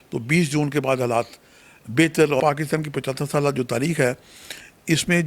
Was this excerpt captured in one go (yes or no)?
no